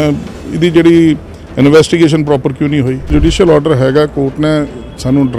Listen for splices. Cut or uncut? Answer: cut